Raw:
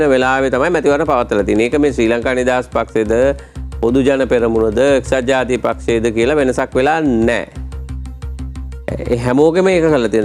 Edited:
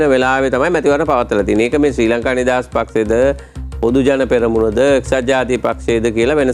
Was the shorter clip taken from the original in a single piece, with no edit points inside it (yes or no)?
yes